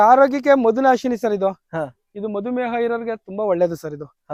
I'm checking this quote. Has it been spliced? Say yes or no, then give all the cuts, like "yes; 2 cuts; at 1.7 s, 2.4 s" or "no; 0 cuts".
no; 0 cuts